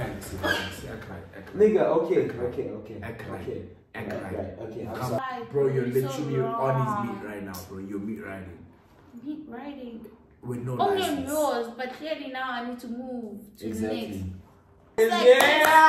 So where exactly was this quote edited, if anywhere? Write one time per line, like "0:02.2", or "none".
0:05.2
0:15.0